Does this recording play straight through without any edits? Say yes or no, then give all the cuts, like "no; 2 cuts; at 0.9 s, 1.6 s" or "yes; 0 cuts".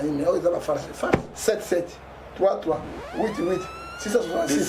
no; 1 cut; at 1.3 s